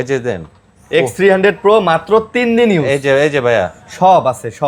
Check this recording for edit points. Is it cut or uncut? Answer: uncut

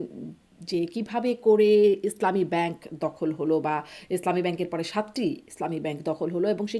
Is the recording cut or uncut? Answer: uncut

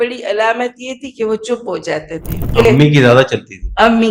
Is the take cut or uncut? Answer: cut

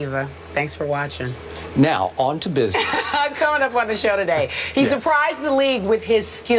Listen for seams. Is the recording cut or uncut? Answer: cut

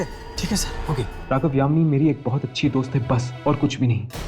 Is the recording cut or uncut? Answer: cut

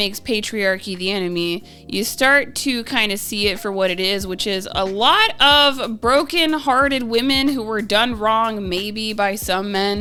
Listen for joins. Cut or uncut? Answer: uncut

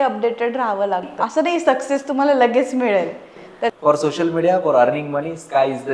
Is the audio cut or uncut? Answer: cut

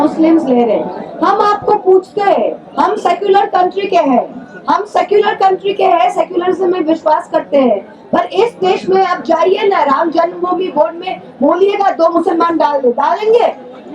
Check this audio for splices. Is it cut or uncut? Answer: uncut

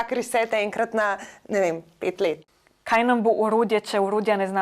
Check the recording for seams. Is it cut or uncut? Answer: cut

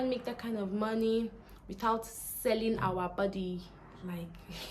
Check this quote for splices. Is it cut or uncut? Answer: uncut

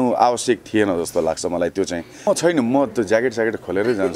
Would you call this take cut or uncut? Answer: cut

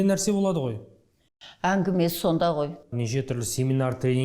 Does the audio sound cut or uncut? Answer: cut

